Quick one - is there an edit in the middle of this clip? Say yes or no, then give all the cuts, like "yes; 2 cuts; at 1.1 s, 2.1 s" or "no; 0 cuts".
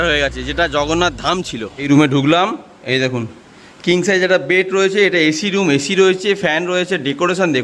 yes; 1 cut; at 1.8 s